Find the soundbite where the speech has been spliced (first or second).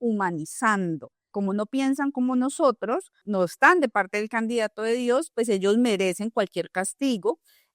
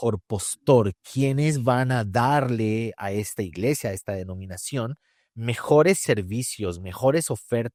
first